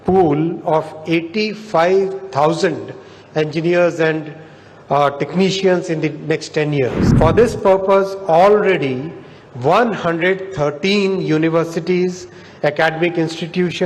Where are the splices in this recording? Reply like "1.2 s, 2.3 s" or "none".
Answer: 7.0 s